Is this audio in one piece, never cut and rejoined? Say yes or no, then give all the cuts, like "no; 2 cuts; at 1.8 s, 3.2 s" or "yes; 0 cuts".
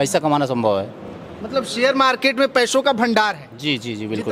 yes; 0 cuts